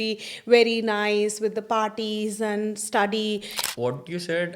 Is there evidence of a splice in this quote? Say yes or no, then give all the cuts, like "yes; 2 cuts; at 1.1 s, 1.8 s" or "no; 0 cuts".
yes; 1 cut; at 3.6 s